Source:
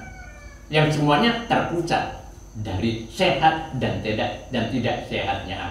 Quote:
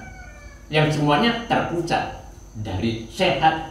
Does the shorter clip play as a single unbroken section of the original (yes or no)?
yes